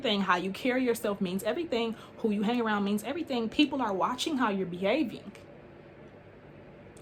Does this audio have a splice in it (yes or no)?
no